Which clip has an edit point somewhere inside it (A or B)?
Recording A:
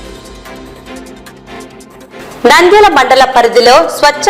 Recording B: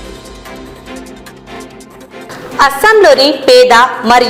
A